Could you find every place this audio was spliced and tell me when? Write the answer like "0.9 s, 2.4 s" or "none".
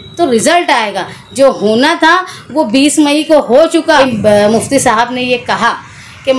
4.0 s